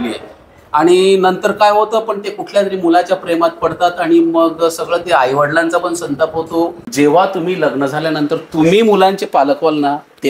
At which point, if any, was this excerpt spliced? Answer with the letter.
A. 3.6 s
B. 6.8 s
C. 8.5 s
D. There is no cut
B